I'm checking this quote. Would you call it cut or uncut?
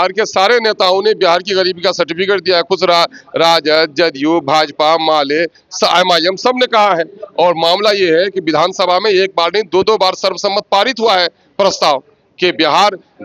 uncut